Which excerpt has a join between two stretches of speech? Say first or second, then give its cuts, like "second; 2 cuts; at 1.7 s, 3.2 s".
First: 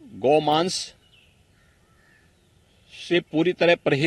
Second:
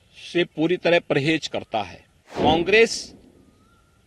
second; 1 cut; at 2.3 s